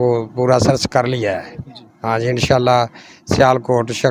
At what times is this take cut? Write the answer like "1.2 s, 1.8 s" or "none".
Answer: none

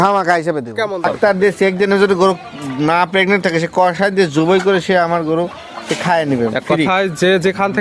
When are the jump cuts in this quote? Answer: 1.1 s

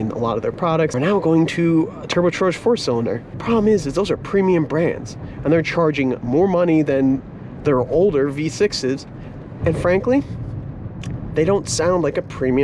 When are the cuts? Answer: 0.9 s, 3.3 s

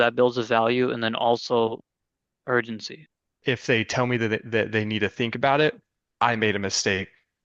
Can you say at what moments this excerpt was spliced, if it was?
3.3 s

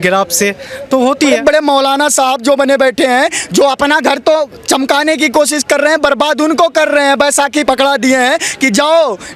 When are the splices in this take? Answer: 1.4 s, 7.6 s

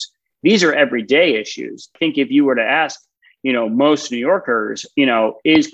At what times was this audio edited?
1.9 s

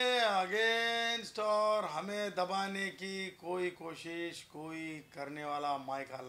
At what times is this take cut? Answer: none

